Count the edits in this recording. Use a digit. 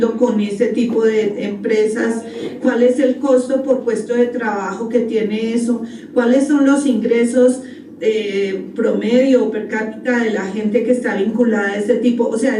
1